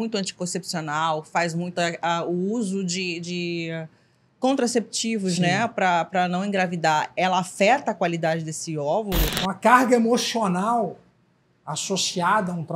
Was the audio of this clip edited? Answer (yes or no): yes